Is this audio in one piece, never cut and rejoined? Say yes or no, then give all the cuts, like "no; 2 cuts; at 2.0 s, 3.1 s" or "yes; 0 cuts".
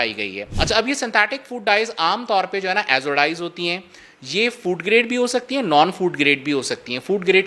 yes; 0 cuts